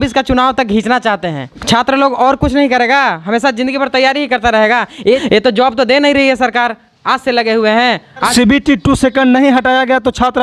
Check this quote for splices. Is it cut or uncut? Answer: cut